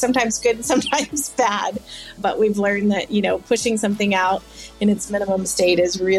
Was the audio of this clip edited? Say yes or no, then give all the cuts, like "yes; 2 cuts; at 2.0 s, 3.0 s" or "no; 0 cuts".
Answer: yes; 1 cut; at 2.2 s